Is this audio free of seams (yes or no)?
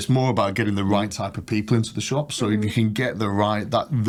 yes